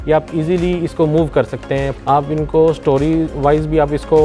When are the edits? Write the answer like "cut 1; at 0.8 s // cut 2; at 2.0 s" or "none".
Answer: cut 1; at 1.9 s // cut 2; at 3.3 s

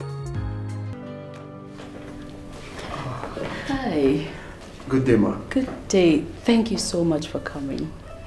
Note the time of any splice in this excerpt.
cut 1; at 0.9 s

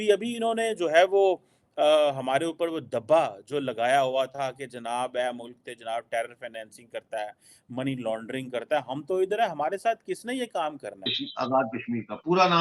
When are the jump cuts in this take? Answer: cut 1; at 11.1 s

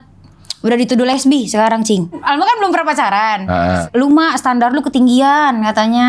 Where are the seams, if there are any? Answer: cut 1; at 2.2 s // cut 2; at 3.8 s

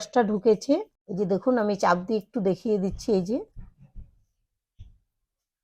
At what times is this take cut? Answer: cut 1; at 1.0 s

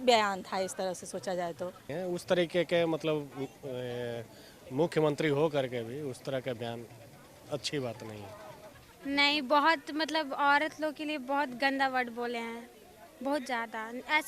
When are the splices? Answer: cut 1; at 1.9 s // cut 2; at 8.9 s

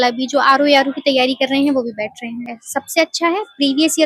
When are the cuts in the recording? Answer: cut 1; at 2.5 s

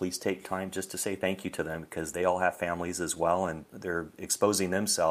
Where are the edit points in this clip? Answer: none

